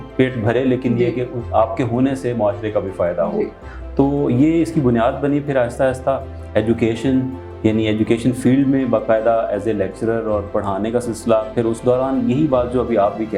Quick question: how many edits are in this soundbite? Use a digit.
0